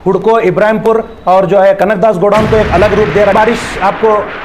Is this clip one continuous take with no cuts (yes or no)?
no